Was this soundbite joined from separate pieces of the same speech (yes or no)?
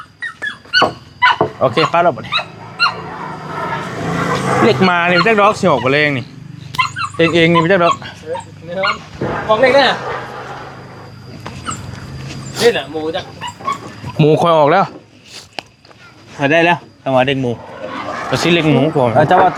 no